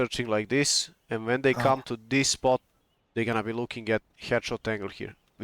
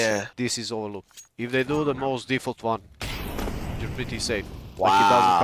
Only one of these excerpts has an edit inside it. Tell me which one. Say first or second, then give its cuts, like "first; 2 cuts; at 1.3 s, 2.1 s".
second; 1 cut; at 1.2 s